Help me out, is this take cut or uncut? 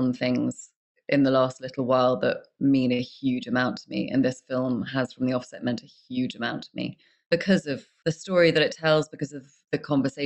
uncut